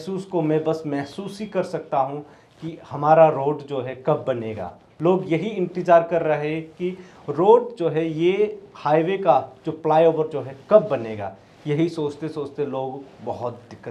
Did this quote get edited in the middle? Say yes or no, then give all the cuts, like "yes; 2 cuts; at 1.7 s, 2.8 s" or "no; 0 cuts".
no; 0 cuts